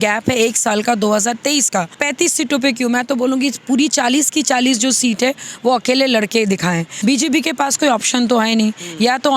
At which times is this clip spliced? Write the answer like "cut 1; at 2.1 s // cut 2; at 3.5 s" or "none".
cut 1; at 2.0 s // cut 2; at 6.9 s